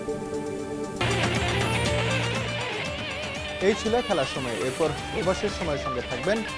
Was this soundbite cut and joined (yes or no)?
no